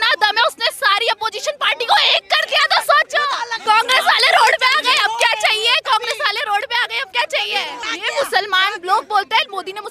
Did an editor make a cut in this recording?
yes; 2 cuts; at 3.6 s, 7.9 s

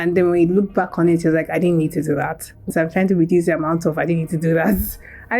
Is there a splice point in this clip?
yes; 1 cut; at 2.7 s

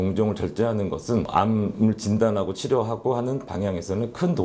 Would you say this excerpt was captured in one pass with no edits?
no; 1 cut; at 1.3 s

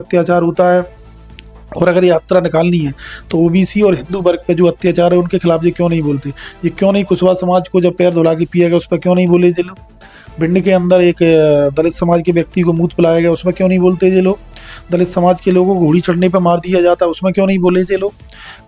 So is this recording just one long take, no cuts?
yes; 0 cuts

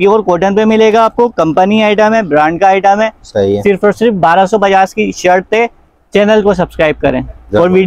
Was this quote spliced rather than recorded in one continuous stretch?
no; 0 cuts

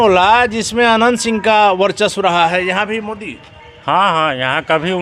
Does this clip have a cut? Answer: no; 0 cuts

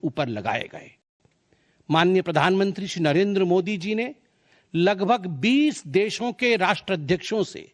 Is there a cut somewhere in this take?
no; 0 cuts

